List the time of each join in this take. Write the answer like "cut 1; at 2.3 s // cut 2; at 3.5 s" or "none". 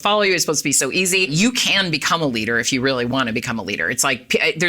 cut 1; at 1.3 s